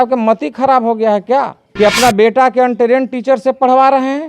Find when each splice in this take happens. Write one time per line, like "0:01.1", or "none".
0:01.6